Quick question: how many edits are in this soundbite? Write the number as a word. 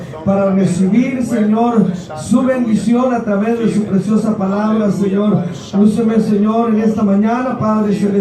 one